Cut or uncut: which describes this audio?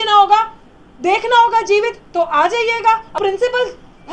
cut